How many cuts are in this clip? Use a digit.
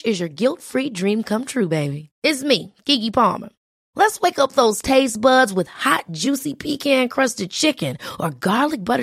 0